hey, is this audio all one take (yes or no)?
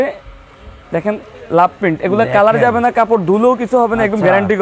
yes